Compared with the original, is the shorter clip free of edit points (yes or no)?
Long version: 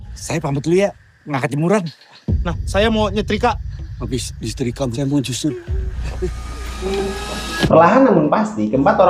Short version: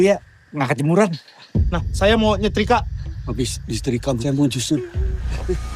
yes